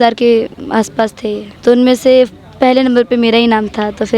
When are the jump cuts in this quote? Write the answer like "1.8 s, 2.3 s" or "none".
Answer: 1.5 s

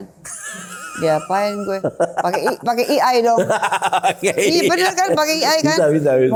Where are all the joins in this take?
none

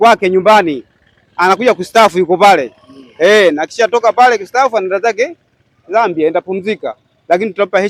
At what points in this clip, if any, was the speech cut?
none

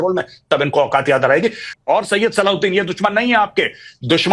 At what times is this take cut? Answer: 1.7 s

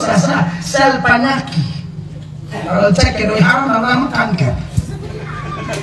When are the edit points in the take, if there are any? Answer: none

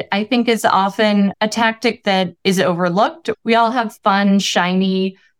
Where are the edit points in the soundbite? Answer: 1.3 s, 2.4 s, 3.2 s

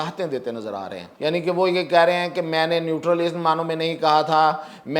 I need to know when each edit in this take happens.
1.0 s

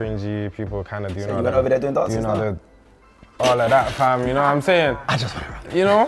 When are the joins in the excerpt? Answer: none

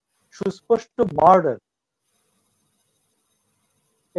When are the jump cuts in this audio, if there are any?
none

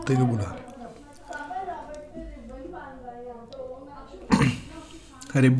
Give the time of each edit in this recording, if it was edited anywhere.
none

